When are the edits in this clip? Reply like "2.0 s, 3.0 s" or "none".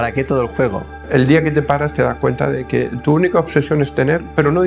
0.9 s